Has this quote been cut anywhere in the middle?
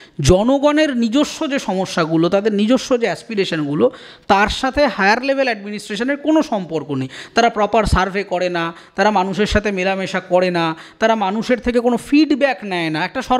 no; 0 cuts

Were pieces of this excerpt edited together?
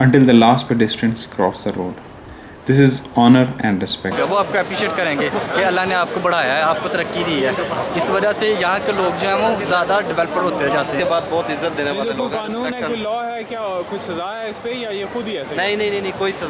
yes; 2 cuts; at 4.1 s, 11.0 s

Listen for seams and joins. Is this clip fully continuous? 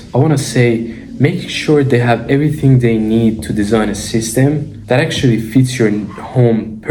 yes; 0 cuts

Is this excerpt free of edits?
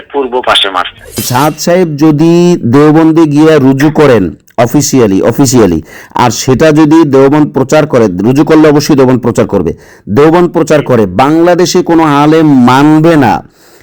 no; 1 cut; at 1.1 s

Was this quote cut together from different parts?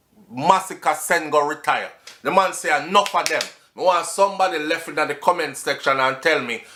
no; 0 cuts

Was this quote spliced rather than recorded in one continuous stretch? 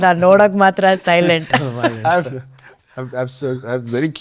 no; 0 cuts

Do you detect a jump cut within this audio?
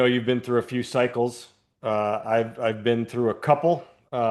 no; 0 cuts

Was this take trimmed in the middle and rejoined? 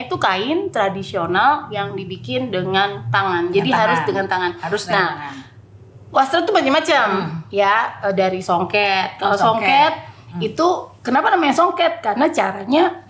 no; 0 cuts

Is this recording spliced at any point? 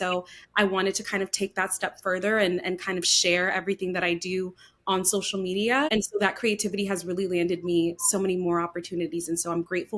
yes; 1 cut; at 5.9 s

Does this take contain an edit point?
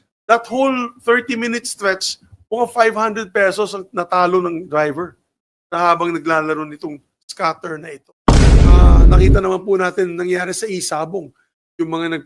yes; 2 cuts; at 8.1 s, 9.1 s

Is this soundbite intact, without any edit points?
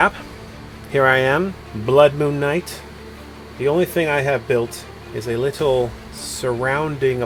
yes; 0 cuts

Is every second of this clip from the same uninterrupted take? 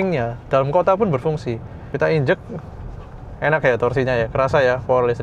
no; 1 cut; at 1.9 s

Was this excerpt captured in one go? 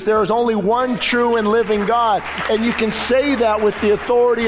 yes; 0 cuts

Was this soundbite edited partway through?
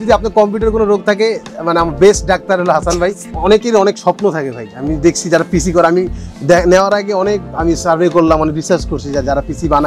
yes; 1 cut; at 3.3 s

